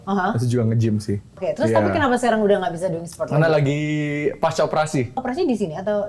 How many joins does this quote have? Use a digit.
2